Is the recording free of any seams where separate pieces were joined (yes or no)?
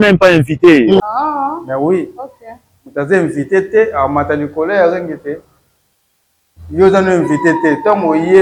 yes